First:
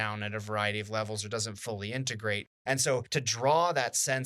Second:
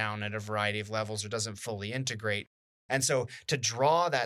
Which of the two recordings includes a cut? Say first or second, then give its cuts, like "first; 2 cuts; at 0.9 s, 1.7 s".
first; 1 cut; at 2.9 s